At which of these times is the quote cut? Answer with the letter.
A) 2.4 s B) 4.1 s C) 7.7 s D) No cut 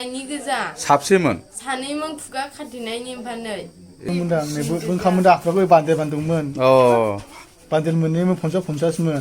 B